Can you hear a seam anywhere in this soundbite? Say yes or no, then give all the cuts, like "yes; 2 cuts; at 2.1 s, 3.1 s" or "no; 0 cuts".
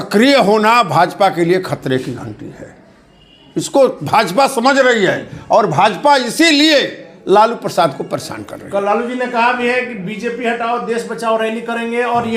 no; 0 cuts